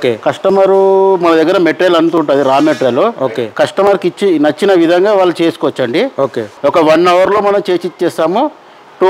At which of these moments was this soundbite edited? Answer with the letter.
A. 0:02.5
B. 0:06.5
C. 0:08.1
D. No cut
B